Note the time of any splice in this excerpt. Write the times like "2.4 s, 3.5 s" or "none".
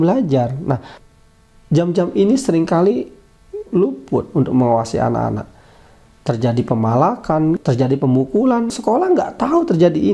3.6 s, 7.6 s, 8.7 s